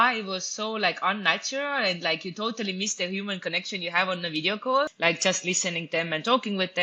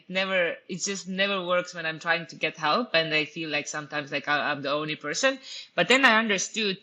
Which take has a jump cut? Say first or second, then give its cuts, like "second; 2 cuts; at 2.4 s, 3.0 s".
first; 1 cut; at 4.9 s